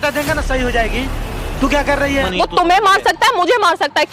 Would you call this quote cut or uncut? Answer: cut